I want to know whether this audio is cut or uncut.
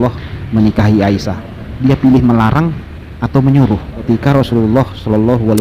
cut